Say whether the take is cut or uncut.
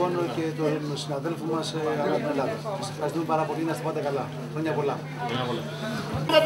uncut